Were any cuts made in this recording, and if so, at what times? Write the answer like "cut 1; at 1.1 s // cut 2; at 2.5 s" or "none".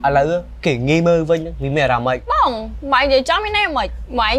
cut 1; at 2.3 s